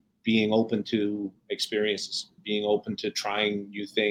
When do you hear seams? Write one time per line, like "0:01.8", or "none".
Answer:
0:02.4